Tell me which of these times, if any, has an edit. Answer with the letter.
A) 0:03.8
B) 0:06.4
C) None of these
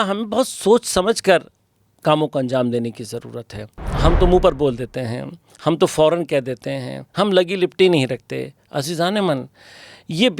A